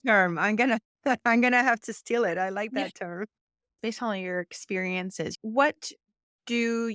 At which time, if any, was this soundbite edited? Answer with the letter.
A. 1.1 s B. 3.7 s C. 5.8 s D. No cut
B